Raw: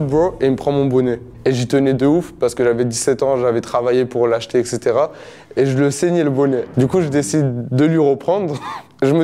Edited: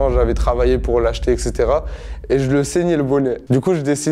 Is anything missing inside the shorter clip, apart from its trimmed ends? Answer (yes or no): no